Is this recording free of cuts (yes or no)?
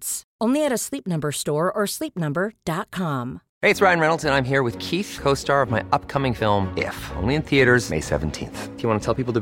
no